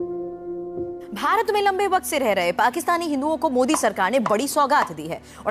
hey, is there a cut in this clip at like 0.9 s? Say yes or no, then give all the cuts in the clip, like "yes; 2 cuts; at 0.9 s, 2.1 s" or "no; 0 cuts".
yes; 1 cut; at 0.9 s